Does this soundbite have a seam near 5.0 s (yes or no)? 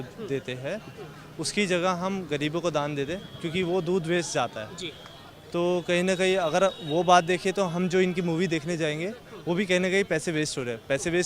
no